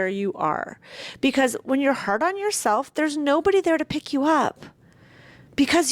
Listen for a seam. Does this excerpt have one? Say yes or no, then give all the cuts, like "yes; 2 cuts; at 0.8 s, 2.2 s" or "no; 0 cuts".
no; 0 cuts